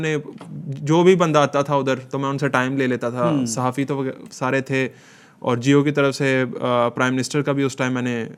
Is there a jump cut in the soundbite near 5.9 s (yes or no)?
no